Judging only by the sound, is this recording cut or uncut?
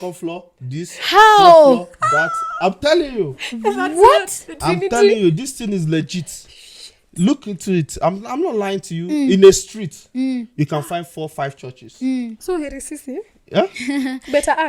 uncut